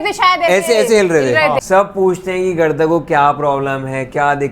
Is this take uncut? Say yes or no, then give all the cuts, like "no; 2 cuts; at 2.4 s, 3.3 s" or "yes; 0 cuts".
no; 1 cut; at 1.6 s